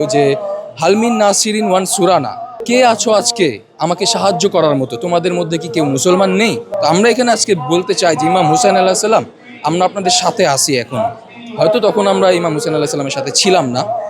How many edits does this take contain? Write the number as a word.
two